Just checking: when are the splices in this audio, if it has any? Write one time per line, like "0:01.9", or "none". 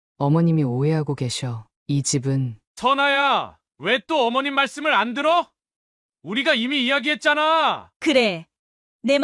0:02.6
0:07.9